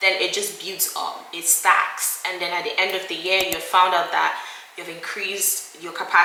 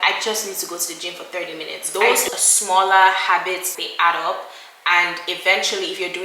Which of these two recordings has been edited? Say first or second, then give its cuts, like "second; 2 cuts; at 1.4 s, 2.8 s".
second; 2 cuts; at 1.7 s, 3.7 s